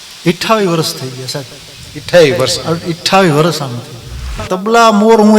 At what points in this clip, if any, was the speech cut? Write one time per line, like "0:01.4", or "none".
0:04.5

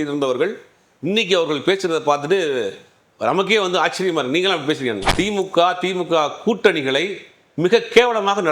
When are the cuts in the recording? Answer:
0:05.0

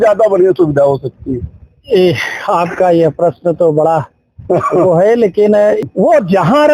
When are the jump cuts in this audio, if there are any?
0:05.8

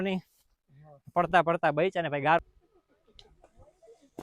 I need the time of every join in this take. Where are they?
0:02.4

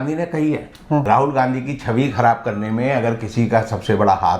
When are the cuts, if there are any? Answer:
0:01.0

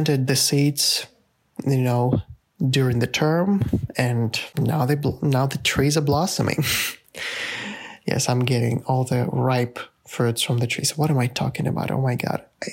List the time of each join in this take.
0:04.4

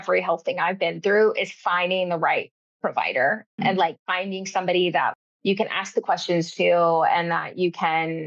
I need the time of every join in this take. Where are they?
0:03.5
0:05.1

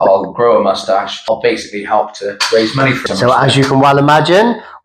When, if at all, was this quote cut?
0:01.2
0:03.0

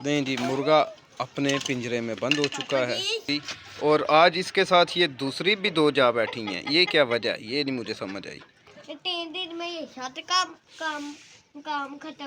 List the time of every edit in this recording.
0:03.3
0:08.7

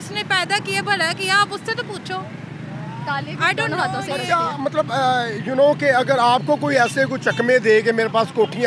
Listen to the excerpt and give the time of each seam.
none

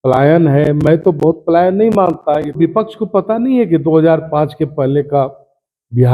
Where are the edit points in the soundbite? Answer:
0:02.6

